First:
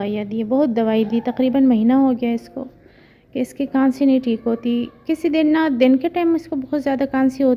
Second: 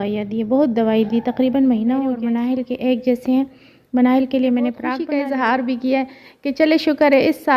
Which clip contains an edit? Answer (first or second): second